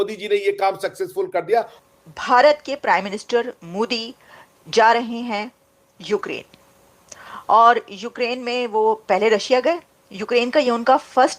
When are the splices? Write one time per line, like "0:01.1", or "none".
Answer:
0:01.8